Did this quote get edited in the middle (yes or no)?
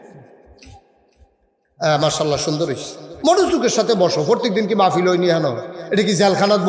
no